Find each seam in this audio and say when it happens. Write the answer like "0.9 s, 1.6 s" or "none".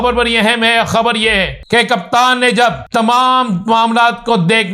1.5 s, 2.8 s